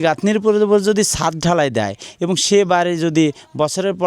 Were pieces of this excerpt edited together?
no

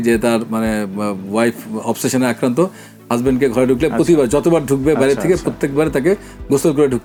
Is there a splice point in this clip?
no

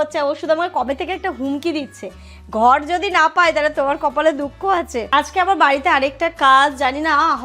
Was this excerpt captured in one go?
no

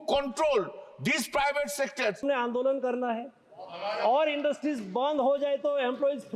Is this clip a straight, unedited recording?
no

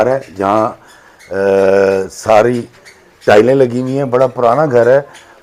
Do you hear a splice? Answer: no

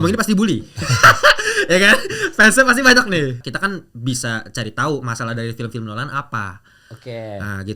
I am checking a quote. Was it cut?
yes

